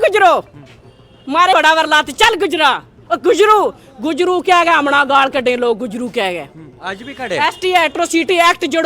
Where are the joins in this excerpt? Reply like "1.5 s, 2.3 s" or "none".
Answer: 1.5 s

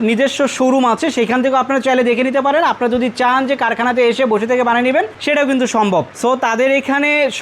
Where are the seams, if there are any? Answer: none

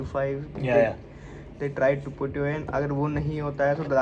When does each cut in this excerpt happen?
none

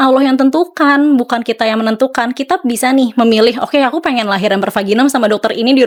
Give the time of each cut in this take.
none

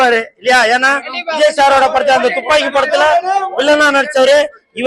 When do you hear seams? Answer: none

